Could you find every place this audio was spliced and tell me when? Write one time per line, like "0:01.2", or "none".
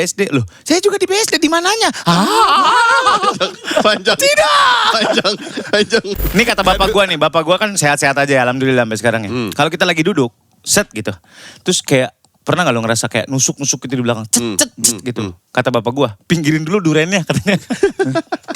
0:06.2